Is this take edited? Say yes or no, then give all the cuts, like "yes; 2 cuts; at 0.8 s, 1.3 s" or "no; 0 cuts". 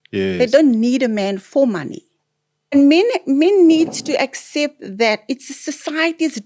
yes; 1 cut; at 2.7 s